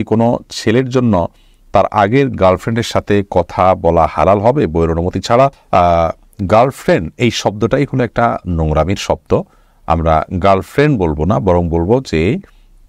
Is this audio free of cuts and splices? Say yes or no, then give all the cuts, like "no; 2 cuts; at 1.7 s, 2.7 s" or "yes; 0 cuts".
yes; 0 cuts